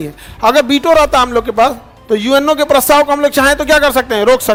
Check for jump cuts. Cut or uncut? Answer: uncut